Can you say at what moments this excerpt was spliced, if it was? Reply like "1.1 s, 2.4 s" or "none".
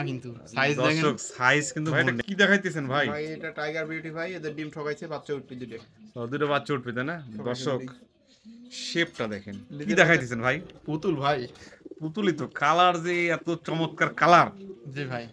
2.0 s, 9.8 s